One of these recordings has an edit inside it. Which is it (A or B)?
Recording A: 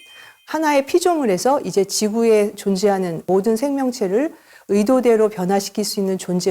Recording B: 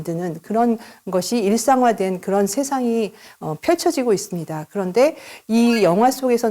A